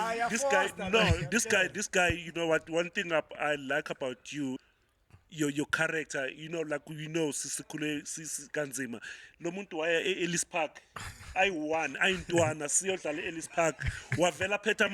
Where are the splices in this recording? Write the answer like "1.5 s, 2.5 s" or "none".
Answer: 4.6 s